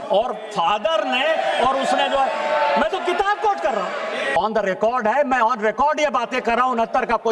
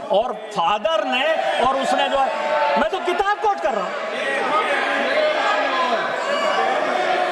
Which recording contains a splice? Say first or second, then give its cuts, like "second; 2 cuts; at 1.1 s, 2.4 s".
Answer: first; 1 cut; at 4.3 s